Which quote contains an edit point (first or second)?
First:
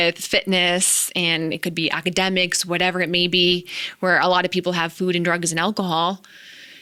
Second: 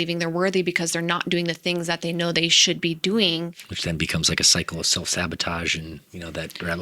second